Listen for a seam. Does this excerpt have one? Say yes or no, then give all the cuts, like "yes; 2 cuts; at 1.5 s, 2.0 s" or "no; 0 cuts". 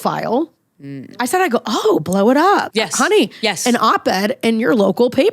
yes; 2 cuts; at 1.2 s, 2.7 s